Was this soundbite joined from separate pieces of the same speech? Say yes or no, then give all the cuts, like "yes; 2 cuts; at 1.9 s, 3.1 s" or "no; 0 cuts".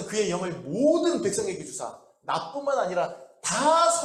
no; 0 cuts